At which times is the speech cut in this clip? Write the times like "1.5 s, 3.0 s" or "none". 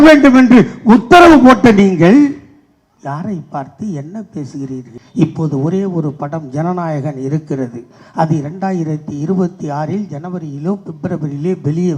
5.0 s